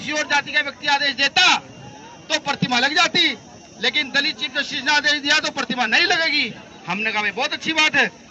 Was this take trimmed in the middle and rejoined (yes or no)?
no